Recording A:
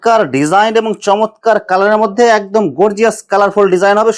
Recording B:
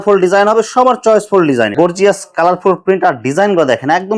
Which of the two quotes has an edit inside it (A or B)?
B